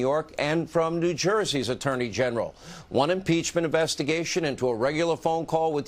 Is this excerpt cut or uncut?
cut